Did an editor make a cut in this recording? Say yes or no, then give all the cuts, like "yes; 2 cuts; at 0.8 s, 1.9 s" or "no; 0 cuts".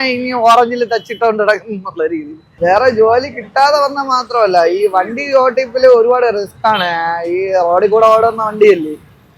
yes; 1 cut; at 2.4 s